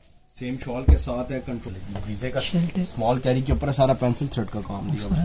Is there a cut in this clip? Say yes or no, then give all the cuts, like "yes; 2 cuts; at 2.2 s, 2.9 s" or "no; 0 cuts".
yes; 1 cut; at 1.6 s